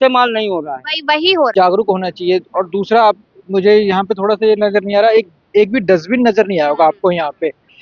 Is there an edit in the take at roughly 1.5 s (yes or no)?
yes